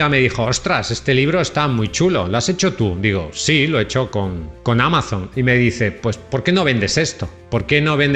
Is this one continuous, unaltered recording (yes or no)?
yes